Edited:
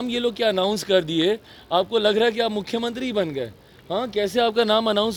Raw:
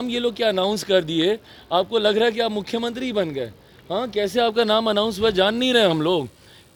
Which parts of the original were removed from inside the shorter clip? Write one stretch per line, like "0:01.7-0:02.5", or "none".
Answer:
none